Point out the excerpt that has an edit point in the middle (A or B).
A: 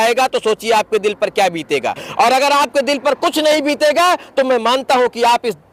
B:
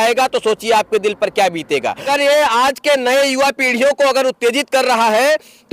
B